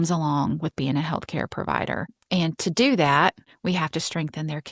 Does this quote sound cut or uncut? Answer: cut